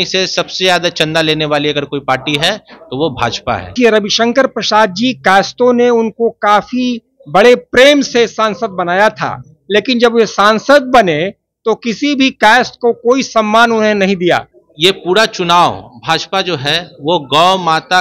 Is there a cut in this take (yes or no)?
yes